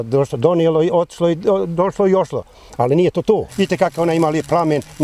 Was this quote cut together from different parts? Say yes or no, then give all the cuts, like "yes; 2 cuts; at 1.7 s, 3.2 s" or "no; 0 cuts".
yes; 1 cut; at 3.5 s